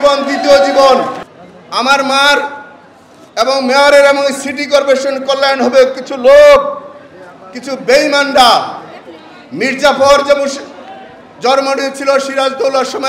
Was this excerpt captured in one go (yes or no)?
no